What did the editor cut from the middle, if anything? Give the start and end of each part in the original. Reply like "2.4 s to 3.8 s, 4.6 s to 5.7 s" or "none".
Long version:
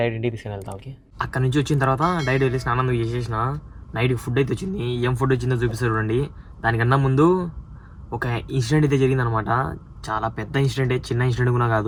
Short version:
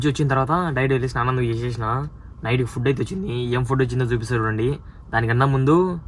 none

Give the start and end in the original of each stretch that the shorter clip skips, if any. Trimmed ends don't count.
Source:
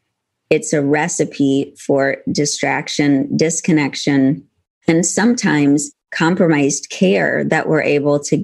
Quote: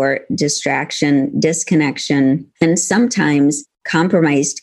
4.4 s to 4.7 s

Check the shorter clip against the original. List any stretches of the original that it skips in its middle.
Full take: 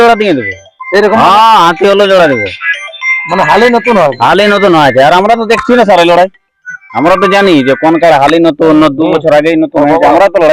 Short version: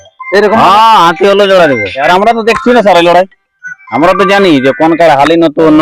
2.6 s to 5.1 s

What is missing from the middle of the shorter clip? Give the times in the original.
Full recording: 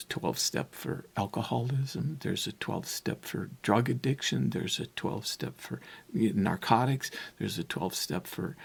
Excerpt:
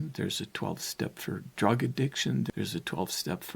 4.6 s to 7.3 s

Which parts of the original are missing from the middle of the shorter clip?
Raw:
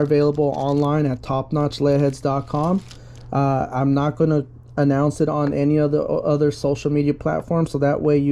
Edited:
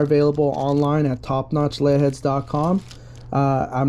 none

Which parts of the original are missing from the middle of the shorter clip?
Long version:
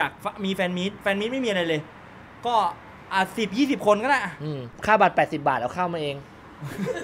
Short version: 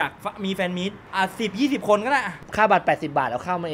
1.0 s to 2.9 s, 4.4 s to 4.7 s

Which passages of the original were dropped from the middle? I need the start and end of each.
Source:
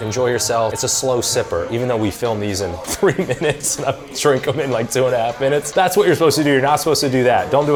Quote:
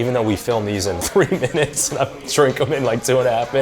2.8 s to 2.9 s

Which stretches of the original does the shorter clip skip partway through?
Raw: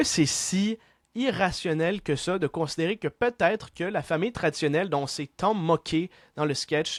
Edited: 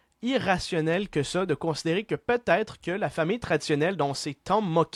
none

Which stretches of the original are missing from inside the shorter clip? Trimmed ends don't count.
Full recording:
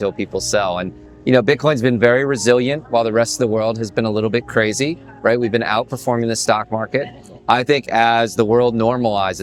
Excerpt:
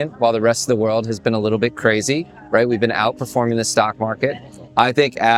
none

